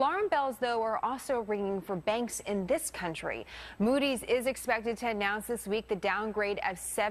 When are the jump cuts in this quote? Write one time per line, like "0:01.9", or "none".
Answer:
0:02.7